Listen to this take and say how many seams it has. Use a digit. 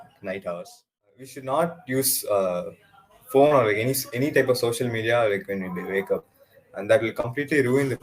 1